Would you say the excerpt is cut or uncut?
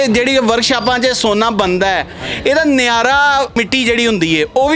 cut